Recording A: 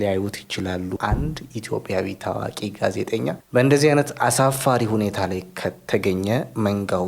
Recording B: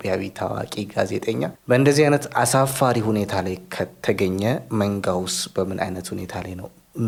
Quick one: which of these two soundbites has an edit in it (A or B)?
A